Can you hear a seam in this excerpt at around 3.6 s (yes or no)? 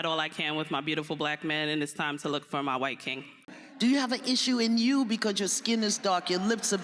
yes